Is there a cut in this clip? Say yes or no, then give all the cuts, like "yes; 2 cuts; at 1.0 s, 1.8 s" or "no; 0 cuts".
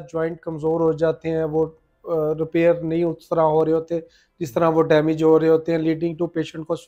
no; 0 cuts